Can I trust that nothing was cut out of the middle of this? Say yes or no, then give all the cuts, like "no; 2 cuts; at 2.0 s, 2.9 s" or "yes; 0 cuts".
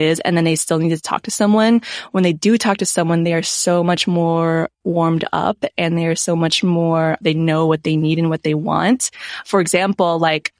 yes; 0 cuts